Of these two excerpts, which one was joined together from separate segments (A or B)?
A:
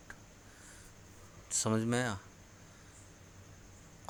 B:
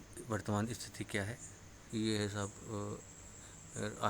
B